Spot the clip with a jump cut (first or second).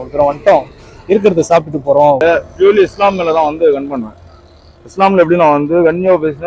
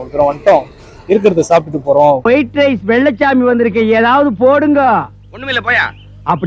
first